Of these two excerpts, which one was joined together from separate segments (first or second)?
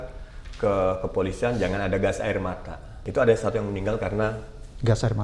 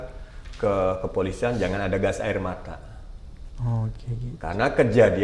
first